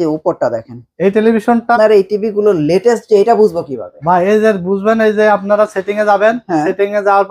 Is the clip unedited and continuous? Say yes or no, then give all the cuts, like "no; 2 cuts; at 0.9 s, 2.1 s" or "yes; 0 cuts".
no; 1 cut; at 1.8 s